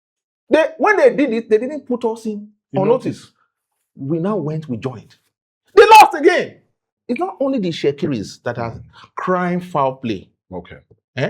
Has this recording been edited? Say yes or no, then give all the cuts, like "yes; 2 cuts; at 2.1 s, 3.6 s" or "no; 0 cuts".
yes; 1 cut; at 6.9 s